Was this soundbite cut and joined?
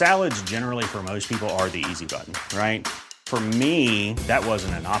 no; 0 cuts

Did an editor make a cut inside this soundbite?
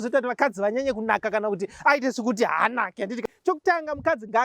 yes; 1 cut; at 3.2 s

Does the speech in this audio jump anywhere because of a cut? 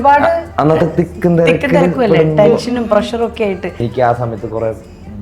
yes; 1 cut; at 3.8 s

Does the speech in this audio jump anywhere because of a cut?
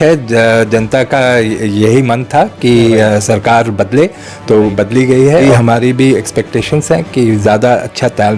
yes; 1 cut; at 5.4 s

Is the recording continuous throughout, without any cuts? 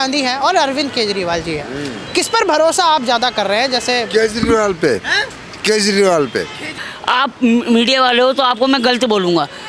no; 1 cut; at 6.9 s

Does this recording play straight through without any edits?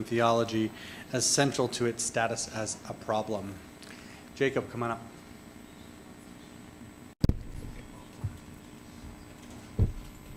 yes; 0 cuts

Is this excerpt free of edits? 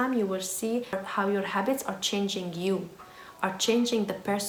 yes; 0 cuts

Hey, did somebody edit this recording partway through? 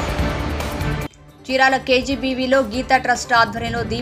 yes; 1 cut; at 0.9 s

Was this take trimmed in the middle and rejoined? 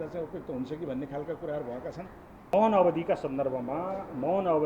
yes; 1 cut; at 2.5 s

